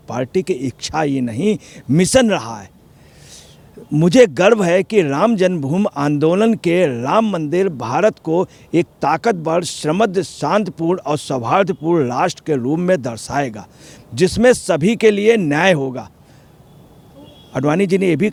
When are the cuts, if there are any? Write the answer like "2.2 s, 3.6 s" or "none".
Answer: none